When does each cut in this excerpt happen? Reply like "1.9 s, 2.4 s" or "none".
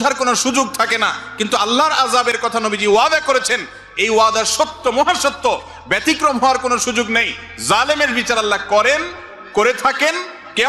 none